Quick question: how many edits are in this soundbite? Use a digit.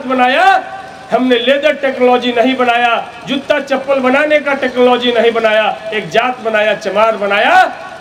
0